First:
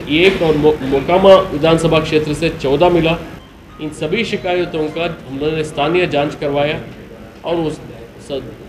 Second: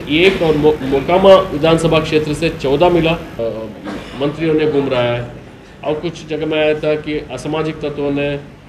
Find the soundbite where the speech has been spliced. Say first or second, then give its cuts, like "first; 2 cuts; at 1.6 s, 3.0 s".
second; 1 cut; at 3.3 s